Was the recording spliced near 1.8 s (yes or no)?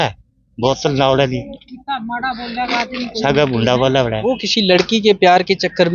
no